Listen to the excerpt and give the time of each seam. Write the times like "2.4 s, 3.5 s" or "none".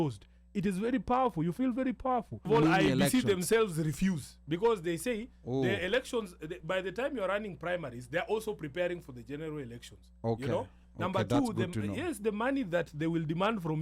2.5 s